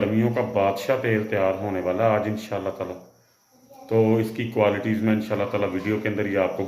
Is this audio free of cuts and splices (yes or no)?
yes